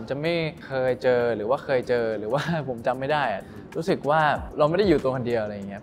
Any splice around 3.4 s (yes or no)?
yes